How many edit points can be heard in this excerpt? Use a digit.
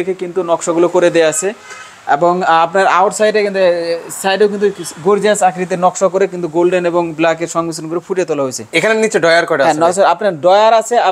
0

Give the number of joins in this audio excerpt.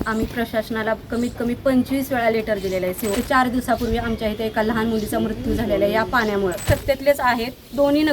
2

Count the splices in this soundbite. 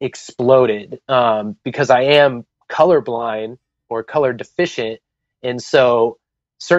0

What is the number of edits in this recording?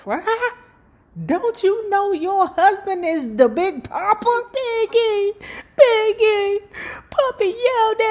1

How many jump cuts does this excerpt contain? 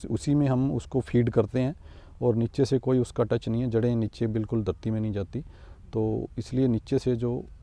0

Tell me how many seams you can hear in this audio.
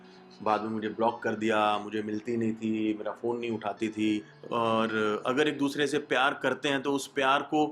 1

